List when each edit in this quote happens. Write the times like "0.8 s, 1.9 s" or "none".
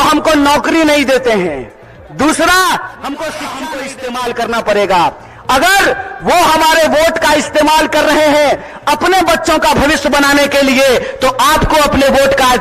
3.8 s